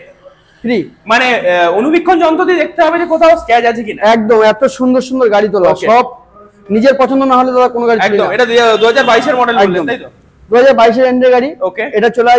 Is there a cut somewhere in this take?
no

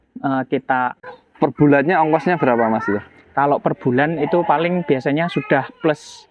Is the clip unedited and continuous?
no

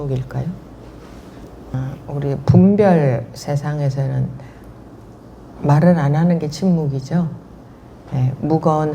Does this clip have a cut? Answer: yes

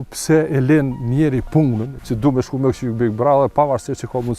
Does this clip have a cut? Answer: yes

